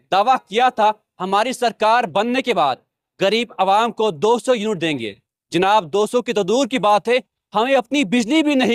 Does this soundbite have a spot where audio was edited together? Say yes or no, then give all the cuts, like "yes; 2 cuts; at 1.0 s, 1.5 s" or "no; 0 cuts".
no; 0 cuts